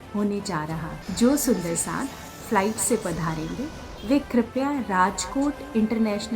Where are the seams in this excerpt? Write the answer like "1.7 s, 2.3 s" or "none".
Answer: 1.0 s